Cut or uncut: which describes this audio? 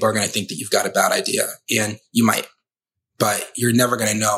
uncut